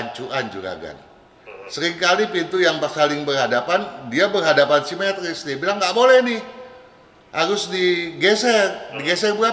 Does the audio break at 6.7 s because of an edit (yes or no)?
no